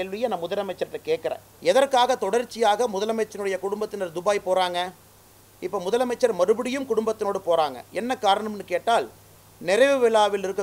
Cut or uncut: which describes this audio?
cut